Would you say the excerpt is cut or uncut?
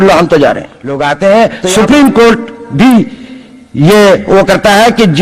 cut